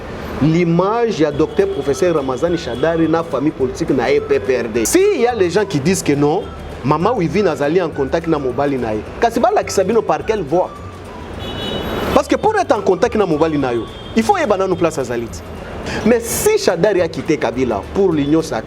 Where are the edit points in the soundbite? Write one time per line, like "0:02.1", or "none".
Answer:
0:04.9
0:15.9